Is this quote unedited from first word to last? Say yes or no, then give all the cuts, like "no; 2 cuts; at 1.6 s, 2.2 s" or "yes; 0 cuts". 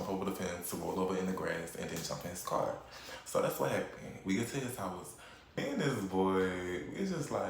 no; 1 cut; at 5.6 s